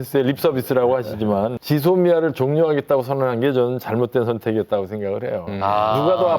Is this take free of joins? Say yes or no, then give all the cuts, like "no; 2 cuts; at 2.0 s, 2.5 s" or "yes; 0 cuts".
no; 1 cut; at 1.6 s